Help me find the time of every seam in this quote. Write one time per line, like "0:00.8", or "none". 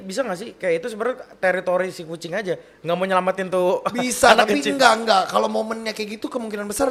none